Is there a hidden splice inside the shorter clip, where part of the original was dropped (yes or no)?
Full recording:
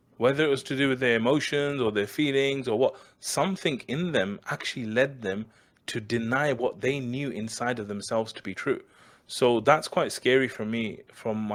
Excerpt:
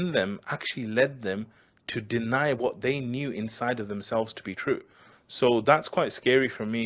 no